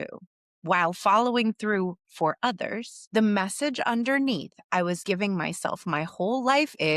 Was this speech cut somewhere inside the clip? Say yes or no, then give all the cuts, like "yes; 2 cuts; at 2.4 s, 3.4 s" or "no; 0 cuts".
yes; 1 cut; at 2.9 s